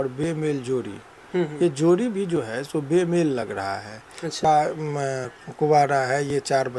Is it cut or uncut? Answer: cut